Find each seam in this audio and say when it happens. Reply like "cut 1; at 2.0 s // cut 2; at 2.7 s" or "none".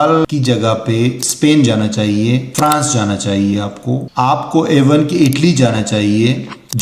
cut 1; at 2.5 s // cut 2; at 4.1 s